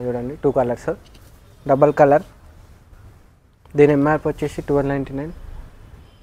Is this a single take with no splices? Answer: yes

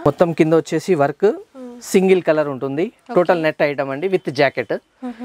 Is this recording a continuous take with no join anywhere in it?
yes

